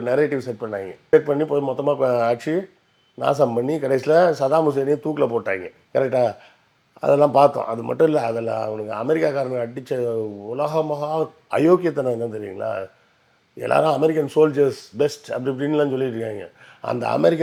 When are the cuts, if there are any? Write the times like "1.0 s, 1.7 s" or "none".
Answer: none